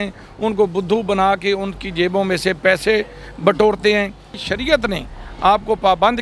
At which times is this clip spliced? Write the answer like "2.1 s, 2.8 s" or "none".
4.3 s